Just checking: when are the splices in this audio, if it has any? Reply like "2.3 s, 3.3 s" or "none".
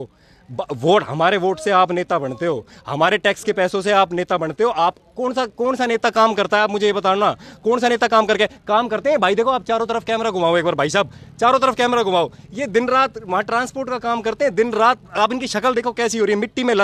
none